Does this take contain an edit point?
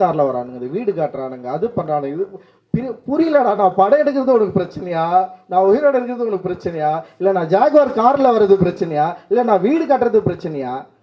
no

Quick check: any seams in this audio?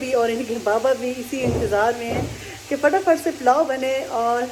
no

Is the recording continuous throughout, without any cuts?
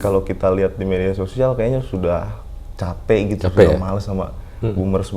yes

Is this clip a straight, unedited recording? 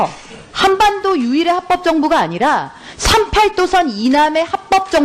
yes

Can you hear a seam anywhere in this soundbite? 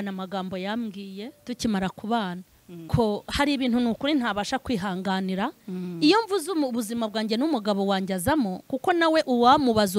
yes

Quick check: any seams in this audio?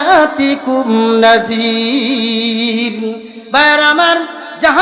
no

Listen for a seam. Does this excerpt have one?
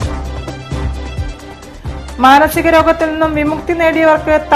yes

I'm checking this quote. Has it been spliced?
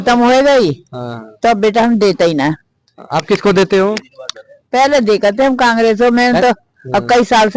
no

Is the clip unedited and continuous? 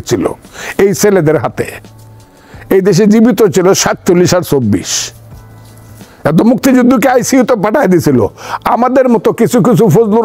yes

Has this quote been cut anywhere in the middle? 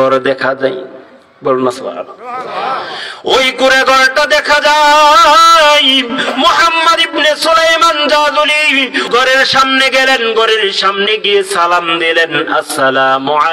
yes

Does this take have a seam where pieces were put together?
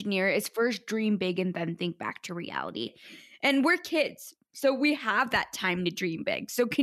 yes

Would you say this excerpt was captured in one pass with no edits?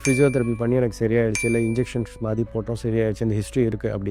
yes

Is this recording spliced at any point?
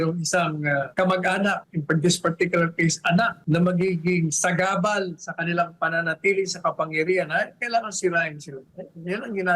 yes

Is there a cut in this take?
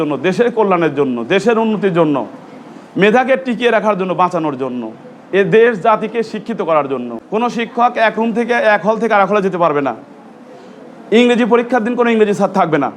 yes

